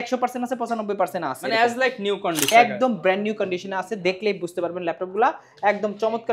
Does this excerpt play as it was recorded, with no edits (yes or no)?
no